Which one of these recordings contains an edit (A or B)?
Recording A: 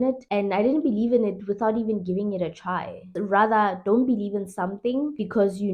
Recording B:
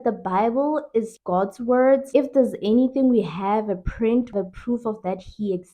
B